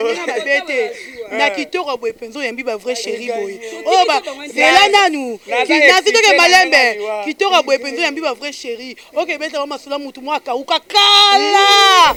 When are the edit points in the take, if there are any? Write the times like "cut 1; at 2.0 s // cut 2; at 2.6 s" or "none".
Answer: none